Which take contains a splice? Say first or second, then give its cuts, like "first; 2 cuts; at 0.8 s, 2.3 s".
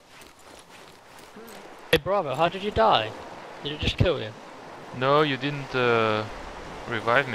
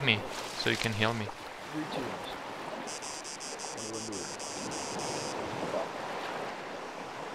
second; 1 cut; at 4.1 s